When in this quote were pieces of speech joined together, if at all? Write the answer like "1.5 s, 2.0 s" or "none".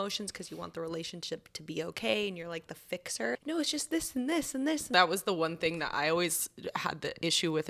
3.3 s, 4.9 s